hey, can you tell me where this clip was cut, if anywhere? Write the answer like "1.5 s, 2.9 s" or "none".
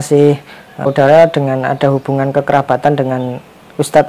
0.9 s